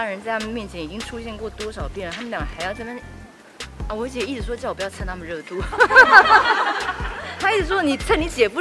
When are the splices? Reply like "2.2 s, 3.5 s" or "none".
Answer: none